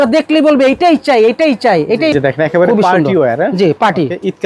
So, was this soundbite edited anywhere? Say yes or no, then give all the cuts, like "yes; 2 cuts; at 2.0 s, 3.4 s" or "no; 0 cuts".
yes; 1 cut; at 2.1 s